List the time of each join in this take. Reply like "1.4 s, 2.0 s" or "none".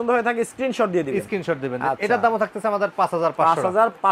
none